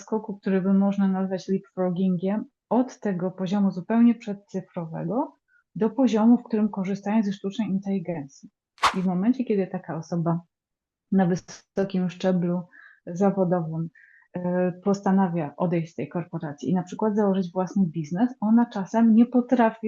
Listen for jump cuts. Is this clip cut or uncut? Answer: cut